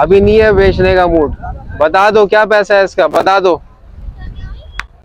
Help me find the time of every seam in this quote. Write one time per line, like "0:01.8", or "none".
none